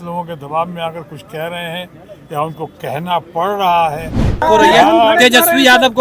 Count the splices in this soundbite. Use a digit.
1